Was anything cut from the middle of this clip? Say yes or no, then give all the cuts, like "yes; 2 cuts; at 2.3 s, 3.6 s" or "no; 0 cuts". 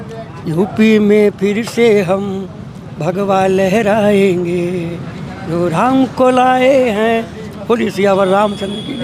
no; 0 cuts